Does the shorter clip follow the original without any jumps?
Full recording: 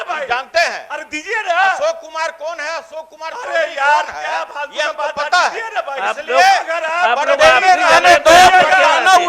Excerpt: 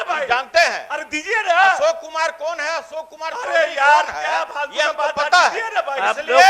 yes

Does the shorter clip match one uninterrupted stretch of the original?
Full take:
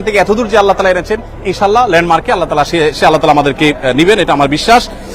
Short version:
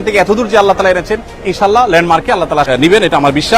no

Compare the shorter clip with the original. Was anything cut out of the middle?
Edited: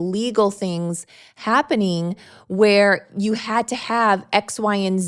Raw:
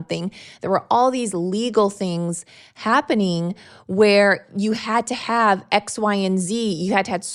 no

